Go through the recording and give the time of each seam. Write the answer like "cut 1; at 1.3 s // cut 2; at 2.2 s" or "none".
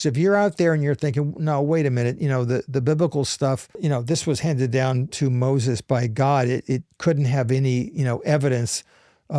cut 1; at 3.8 s // cut 2; at 5.1 s